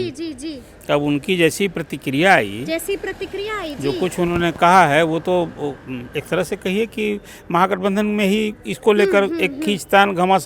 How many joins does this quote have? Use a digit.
0